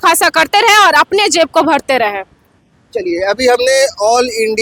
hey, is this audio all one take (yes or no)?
yes